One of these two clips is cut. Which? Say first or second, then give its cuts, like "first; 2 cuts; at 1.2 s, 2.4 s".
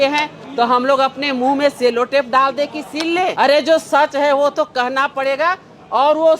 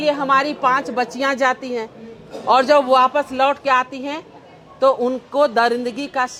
first; 1 cut; at 3.3 s